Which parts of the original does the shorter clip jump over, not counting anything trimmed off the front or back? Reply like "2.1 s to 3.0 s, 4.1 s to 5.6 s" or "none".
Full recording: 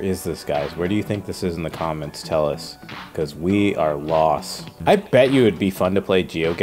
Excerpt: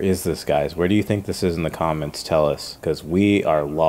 2.7 s to 3.0 s